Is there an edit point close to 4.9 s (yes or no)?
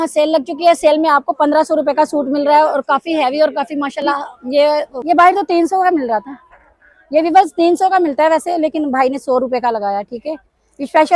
yes